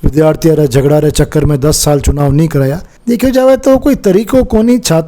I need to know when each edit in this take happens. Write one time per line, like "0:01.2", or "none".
0:02.9